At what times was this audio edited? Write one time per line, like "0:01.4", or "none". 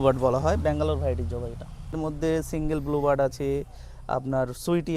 0:01.9